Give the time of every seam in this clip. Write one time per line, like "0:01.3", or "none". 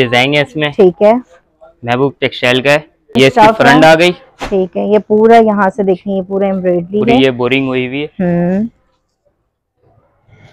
none